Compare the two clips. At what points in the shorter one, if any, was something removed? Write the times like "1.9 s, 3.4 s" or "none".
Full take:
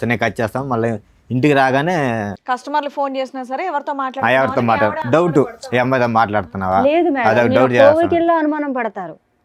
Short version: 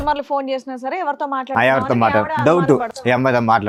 none